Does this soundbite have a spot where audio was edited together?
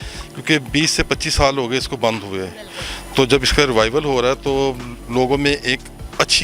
no; 0 cuts

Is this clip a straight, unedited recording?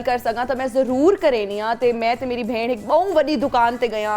yes; 0 cuts

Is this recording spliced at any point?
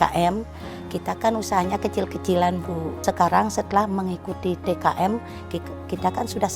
yes; 1 cut; at 3.0 s

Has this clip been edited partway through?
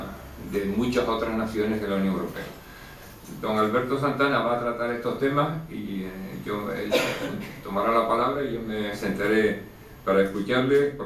yes; 1 cut; at 4.6 s

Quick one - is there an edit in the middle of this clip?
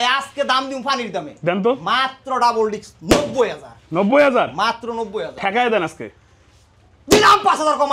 no; 0 cuts

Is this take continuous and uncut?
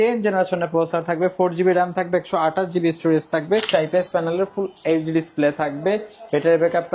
no; 1 cut; at 3.7 s

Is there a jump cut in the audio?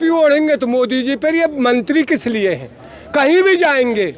no; 0 cuts

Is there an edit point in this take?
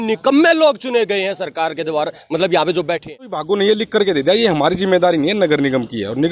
yes; 1 cut; at 3.4 s

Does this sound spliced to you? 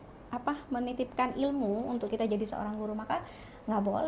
no; 0 cuts

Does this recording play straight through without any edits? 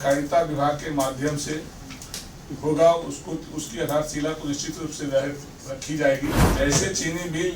no; 1 cut; at 6.5 s

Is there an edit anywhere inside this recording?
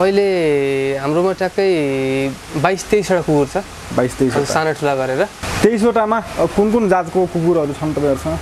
yes; 1 cut; at 5.4 s

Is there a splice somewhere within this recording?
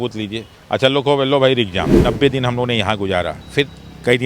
yes; 2 cuts; at 2.0 s, 3.4 s

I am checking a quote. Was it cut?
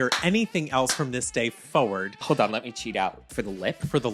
yes; 2 cuts; at 2.1 s, 3.3 s

